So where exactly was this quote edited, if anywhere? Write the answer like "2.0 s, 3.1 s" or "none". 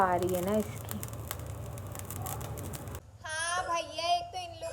2.9 s